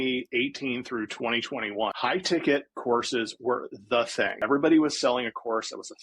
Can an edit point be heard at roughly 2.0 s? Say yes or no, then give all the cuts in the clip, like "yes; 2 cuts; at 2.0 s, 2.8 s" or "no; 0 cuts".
yes; 2 cuts; at 2.0 s, 4.4 s